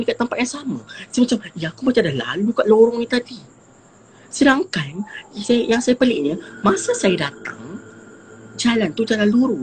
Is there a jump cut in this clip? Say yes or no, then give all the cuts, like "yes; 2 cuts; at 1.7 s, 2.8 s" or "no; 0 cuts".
no; 0 cuts